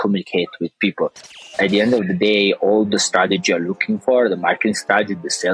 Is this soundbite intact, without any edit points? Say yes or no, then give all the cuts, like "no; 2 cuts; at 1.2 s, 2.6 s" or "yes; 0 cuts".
no; 1 cut; at 1.5 s